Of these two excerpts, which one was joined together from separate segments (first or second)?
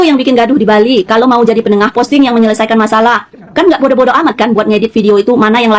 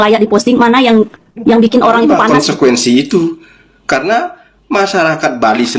second